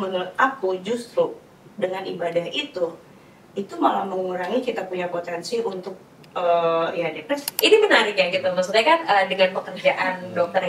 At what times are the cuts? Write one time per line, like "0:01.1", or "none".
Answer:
0:07.5